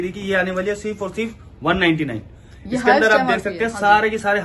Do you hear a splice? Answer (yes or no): no